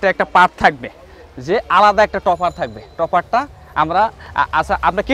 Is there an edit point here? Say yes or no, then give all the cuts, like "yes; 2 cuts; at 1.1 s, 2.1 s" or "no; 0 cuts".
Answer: no; 0 cuts